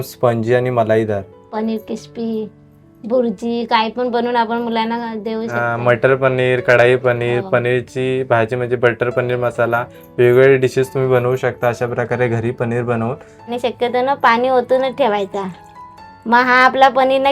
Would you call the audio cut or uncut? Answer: cut